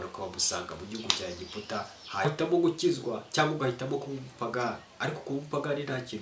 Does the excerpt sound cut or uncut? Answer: cut